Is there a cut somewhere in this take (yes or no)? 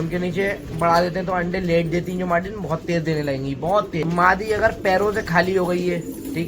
yes